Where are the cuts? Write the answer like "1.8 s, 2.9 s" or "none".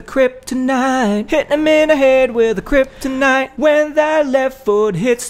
3.4 s

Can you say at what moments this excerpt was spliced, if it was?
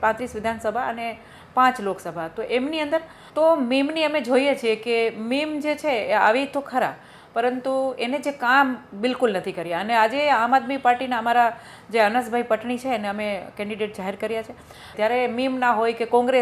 3.2 s, 14.9 s

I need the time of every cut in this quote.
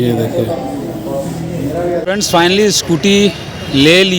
2.0 s

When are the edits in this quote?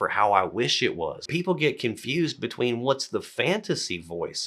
1.2 s

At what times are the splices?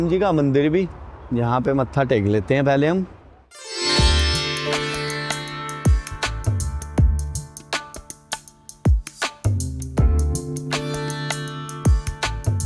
none

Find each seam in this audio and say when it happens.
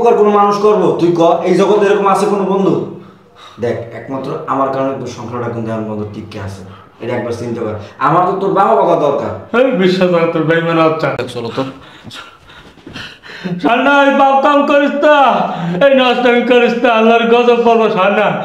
11.2 s

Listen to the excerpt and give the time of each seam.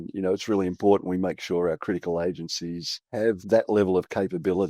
3.4 s

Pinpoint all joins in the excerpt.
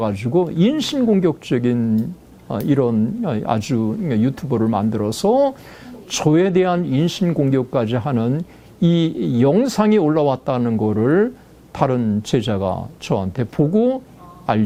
none

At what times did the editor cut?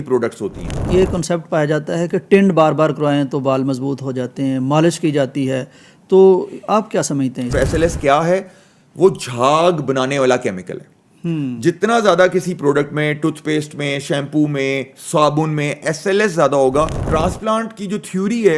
0.8 s, 7.5 s, 17.0 s

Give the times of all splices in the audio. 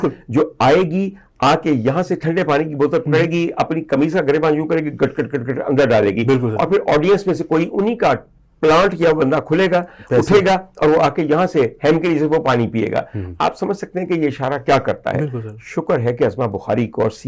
none

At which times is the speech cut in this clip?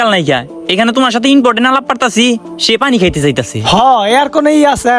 none

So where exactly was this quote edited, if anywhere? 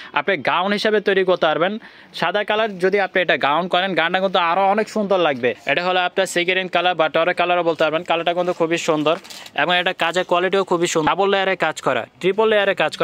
5.6 s, 11.1 s

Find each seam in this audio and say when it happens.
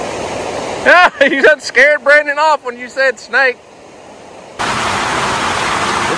4.6 s

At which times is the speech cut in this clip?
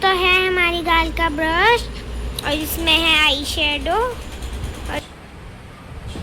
5.0 s

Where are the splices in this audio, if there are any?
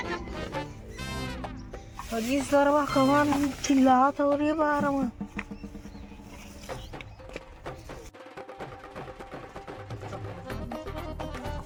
none

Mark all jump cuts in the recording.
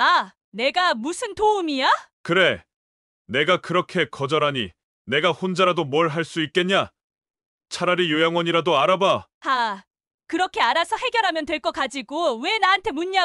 none

